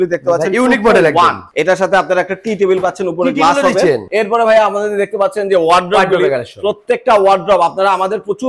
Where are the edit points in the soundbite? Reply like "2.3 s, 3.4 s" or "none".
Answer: 1.5 s, 4.1 s